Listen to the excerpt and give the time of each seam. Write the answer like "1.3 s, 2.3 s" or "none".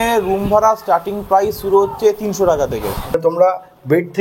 3.1 s